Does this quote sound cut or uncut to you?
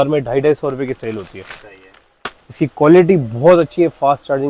uncut